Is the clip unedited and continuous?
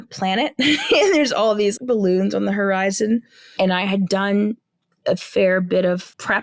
no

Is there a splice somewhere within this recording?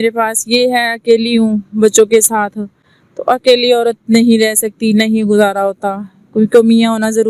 no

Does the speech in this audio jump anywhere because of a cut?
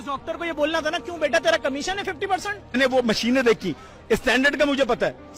yes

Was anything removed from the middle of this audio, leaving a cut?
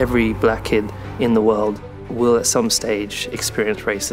no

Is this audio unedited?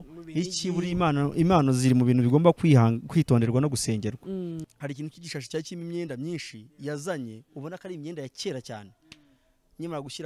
no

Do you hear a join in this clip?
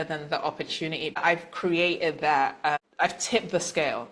yes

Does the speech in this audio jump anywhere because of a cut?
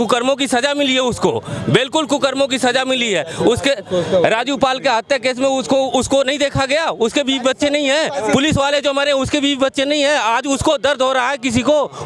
no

